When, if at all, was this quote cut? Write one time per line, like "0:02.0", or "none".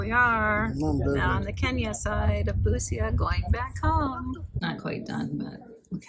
0:04.5